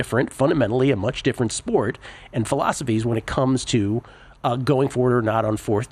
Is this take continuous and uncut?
yes; 0 cuts

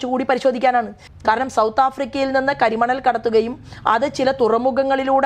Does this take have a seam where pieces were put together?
no; 0 cuts

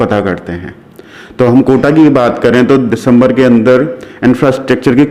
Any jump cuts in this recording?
no; 0 cuts

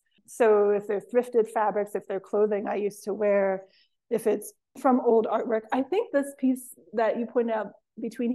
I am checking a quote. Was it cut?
no; 0 cuts

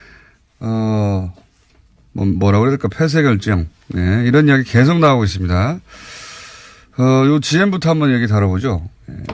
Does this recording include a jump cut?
yes; 1 cut; at 7.0 s

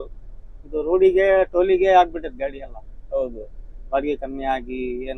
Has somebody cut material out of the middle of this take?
no; 0 cuts

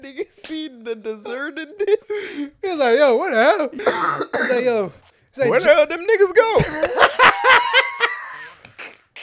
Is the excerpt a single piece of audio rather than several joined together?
no; 1 cut; at 3.7 s

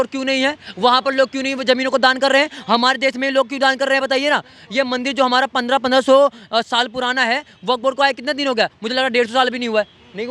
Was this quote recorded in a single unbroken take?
yes; 0 cuts

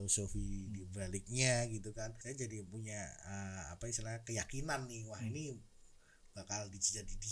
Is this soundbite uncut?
no; 1 cut; at 2.2 s

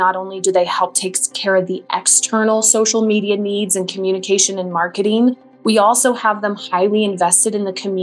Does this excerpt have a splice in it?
no; 0 cuts

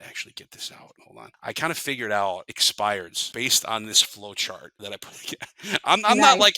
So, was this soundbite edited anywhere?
yes; 4 cuts; at 1.1 s, 2.6 s, 3.2 s, 4.7 s

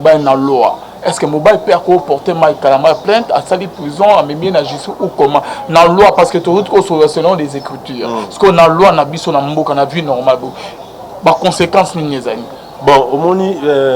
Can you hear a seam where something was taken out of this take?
no; 0 cuts

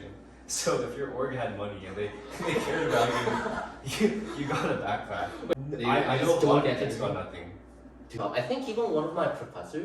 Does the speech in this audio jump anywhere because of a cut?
yes; 2 cuts; at 5.5 s, 8.1 s

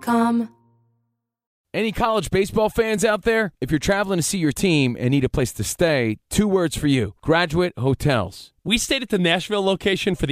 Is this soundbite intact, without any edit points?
no; 1 cut; at 1.2 s

